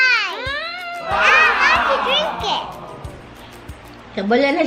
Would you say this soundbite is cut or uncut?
uncut